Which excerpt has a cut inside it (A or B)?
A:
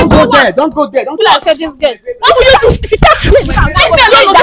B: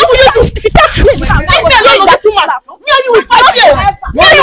A